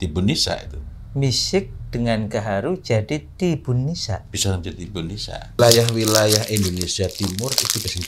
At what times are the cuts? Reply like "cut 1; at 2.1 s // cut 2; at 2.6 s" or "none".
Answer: cut 1; at 5.6 s